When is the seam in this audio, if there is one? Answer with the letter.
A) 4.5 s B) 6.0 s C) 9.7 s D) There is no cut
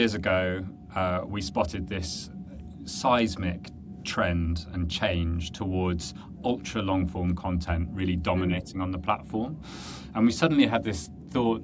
D